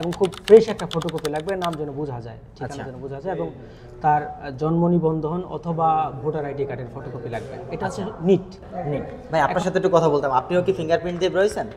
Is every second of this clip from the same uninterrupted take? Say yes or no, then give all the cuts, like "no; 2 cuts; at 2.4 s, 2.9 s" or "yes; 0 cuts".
no; 1 cut; at 9.1 s